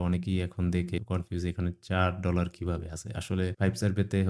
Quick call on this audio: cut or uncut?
uncut